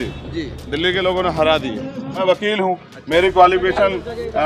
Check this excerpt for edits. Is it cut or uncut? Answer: cut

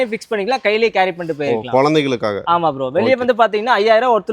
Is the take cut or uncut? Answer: uncut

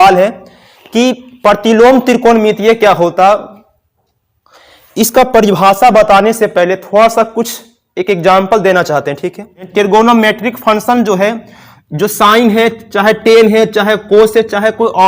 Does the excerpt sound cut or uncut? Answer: cut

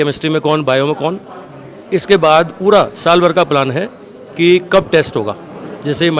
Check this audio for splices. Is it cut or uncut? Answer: uncut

